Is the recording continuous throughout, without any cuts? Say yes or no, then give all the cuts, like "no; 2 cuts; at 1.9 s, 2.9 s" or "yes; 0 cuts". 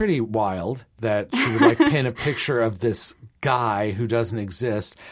no; 1 cut; at 0.9 s